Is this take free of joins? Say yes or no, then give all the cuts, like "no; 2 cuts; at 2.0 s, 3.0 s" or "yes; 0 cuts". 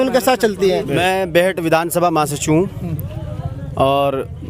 yes; 0 cuts